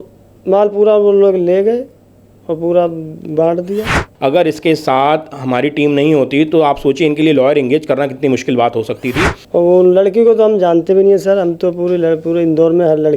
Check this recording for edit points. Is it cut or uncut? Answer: cut